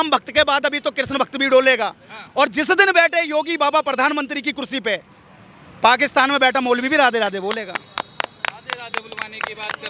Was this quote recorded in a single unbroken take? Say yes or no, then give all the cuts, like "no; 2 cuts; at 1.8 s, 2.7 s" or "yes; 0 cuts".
yes; 0 cuts